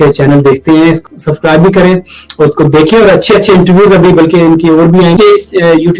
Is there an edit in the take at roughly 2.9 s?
no; 2 cuts; at 1.0 s, 5.2 s

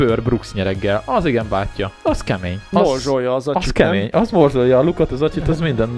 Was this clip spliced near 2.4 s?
yes; 1 cut; at 2.4 s

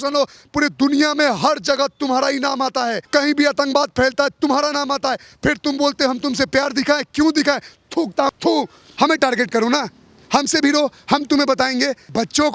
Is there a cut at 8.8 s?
yes; 2 cuts; at 3.0 s, 8.8 s

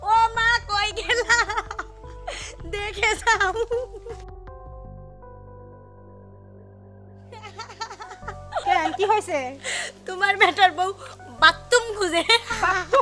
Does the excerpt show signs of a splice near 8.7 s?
yes; 1 cut; at 8.7 s

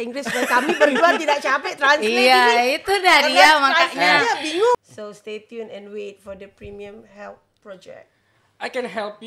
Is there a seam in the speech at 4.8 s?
yes; 1 cut; at 4.8 s

